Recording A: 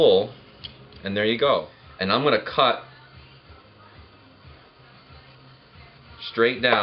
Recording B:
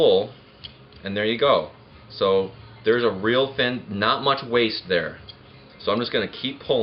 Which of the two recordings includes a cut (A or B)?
A